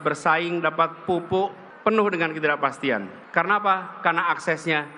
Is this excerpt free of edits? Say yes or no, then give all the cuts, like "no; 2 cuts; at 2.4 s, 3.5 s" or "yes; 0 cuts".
yes; 0 cuts